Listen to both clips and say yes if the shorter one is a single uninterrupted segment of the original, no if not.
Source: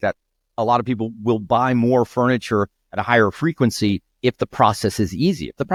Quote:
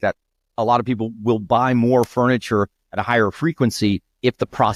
yes